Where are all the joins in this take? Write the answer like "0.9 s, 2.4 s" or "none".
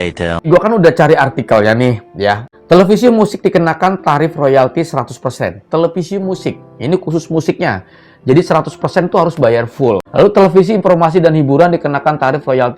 2.5 s, 10.1 s